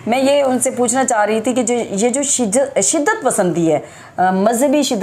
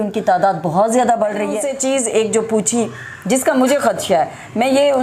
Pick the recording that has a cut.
second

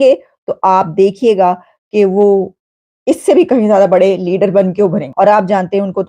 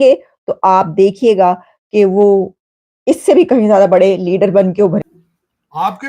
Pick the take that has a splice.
second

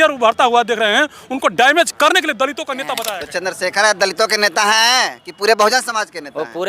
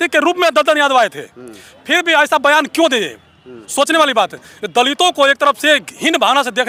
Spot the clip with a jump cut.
first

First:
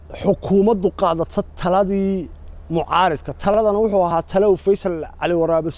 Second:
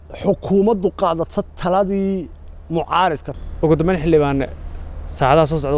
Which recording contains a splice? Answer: second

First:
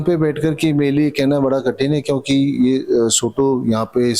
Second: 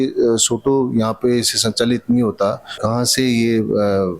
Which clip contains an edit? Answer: second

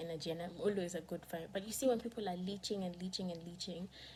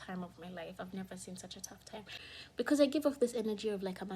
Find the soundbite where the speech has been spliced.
second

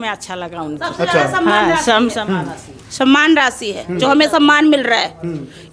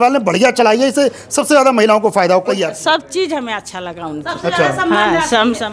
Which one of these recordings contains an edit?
second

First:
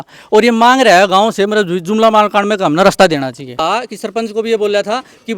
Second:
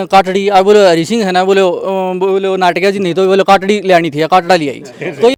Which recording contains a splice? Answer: first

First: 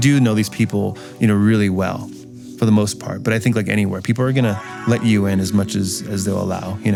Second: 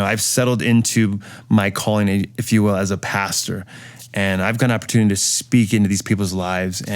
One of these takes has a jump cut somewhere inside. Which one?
second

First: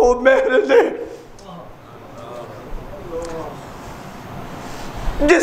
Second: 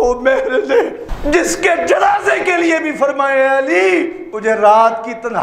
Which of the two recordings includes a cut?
second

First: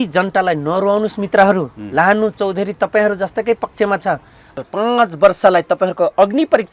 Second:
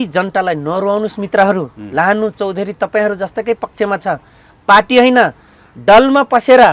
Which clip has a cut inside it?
first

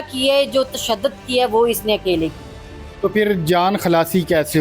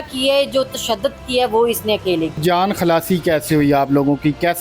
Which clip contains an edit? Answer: second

